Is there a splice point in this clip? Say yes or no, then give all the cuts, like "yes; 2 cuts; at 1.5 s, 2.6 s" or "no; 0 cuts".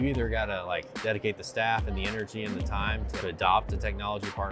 yes; 2 cuts; at 0.9 s, 3.1 s